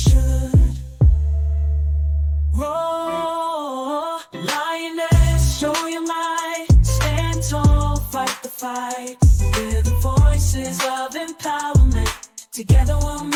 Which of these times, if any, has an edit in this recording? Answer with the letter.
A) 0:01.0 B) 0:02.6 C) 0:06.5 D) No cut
D